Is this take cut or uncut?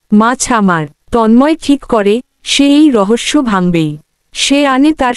cut